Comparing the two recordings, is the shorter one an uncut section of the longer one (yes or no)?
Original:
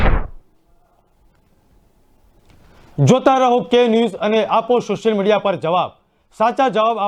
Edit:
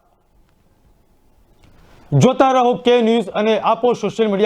yes